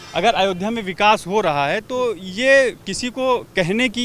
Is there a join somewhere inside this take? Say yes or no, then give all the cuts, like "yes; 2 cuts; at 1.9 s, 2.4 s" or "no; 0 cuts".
no; 0 cuts